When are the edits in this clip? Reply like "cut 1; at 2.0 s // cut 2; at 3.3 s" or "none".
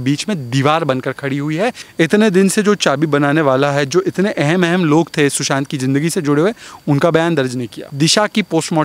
cut 1; at 1.8 s // cut 2; at 7.9 s